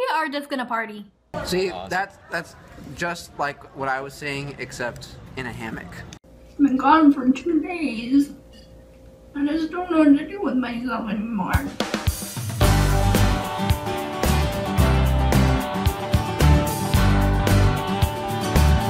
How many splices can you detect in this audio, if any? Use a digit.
3